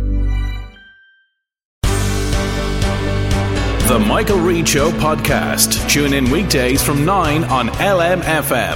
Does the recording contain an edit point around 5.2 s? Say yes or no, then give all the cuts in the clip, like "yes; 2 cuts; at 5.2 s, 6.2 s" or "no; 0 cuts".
no; 1 cut; at 1.6 s